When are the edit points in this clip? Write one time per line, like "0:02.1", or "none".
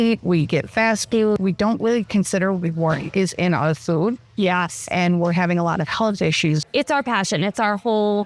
0:06.6